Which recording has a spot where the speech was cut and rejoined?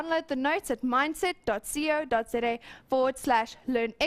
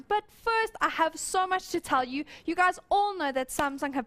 second; 1 cut; at 3.0 s

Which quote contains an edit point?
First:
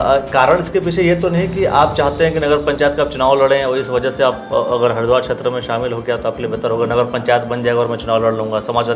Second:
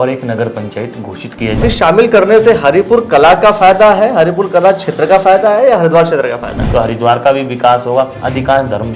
second; 2 cuts; at 1.6 s, 6.6 s

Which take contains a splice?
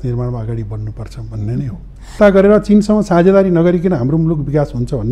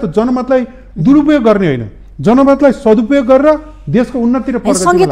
first; 1 cut; at 2.1 s

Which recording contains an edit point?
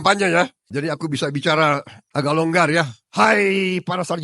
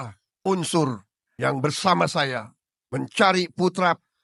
first; 2 cuts; at 2.0 s, 3.0 s

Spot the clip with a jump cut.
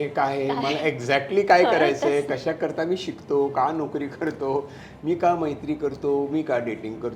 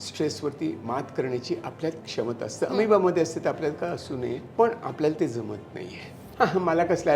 second; 2 cuts; at 4.4 s, 6.2 s

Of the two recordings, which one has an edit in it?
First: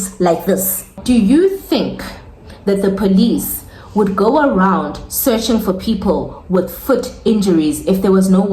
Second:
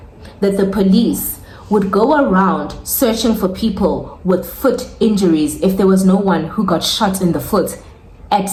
first; 1 cut; at 1.0 s

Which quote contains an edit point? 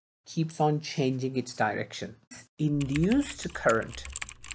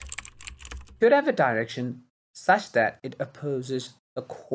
first; 1 cut; at 2.4 s

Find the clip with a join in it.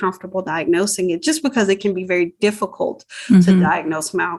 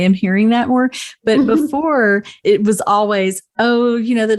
second; 1 cut; at 2.3 s

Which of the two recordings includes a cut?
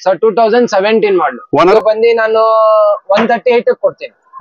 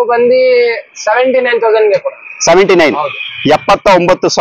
first; 1 cut; at 1.7 s

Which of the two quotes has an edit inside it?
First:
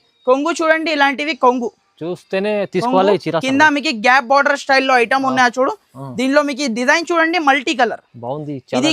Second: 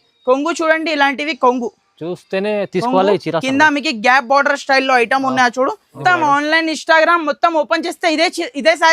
second; 1 cut; at 5.9 s

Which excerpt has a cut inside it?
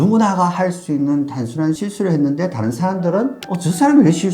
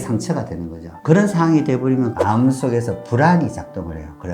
second; 1 cut; at 2.2 s

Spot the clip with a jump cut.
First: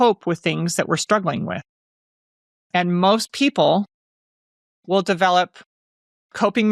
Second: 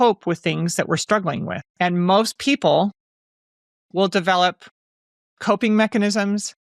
second; 1 cut; at 1.7 s

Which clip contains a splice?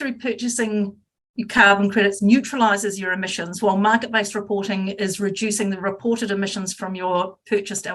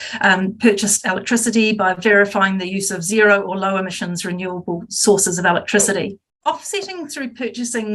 second; 1 cut; at 6.2 s

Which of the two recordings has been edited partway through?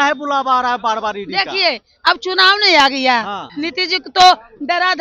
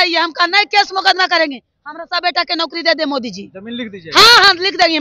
first; 1 cut; at 3.5 s

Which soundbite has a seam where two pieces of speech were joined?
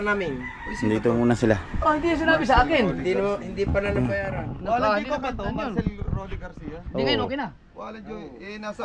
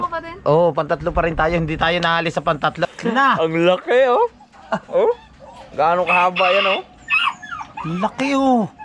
second; 1 cut; at 2.9 s

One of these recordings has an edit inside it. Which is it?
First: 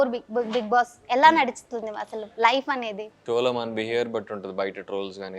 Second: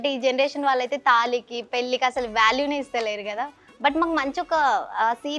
first; 1 cut; at 3.1 s

